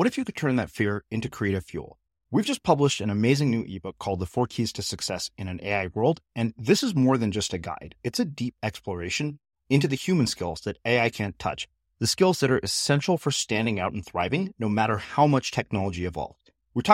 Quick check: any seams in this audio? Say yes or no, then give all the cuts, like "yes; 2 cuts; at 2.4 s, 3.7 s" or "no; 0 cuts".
no; 0 cuts